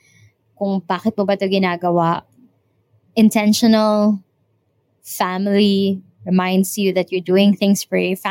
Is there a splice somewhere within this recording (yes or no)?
no